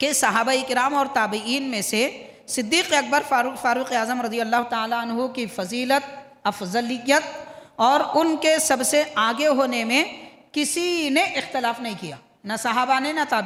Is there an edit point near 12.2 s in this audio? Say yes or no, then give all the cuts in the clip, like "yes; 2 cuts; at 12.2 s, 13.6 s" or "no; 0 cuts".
no; 0 cuts